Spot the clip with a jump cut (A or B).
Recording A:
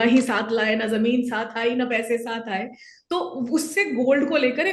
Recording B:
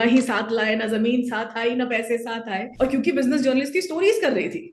B